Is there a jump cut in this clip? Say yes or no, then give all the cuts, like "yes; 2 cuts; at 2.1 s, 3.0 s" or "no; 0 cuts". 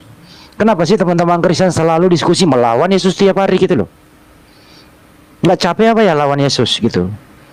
no; 0 cuts